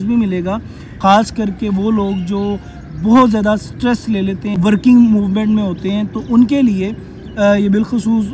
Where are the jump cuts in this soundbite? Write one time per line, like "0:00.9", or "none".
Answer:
0:00.9
0:04.5